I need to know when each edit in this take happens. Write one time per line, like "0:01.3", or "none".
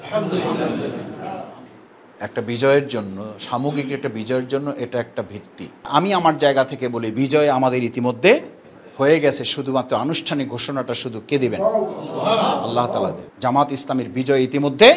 0:05.9